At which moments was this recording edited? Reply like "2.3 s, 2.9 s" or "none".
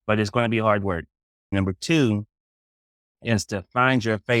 1.5 s